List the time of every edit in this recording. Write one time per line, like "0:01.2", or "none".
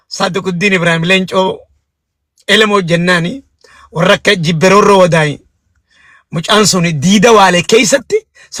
none